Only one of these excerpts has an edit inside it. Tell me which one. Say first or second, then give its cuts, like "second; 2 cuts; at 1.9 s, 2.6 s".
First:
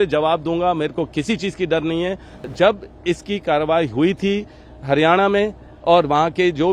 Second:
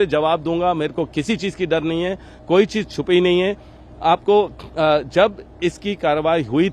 first; 1 cut; at 2.5 s